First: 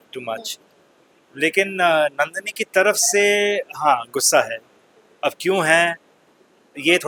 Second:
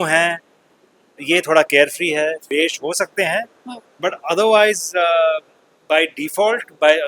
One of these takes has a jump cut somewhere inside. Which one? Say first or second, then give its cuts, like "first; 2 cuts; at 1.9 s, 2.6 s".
second; 1 cut; at 2.4 s